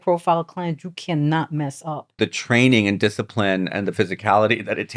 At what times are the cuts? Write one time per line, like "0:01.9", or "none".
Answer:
0:02.2